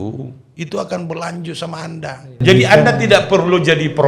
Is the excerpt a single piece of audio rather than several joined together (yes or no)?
no